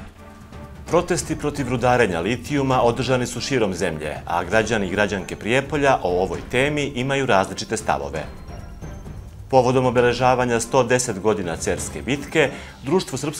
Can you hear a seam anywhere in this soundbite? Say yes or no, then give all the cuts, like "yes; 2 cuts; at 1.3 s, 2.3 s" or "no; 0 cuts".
yes; 1 cut; at 0.9 s